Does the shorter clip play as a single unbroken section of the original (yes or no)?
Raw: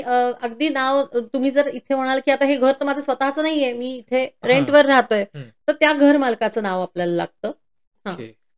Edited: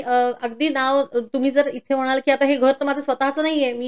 yes